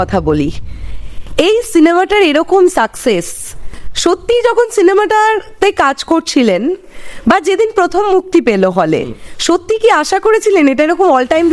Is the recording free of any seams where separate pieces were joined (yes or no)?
yes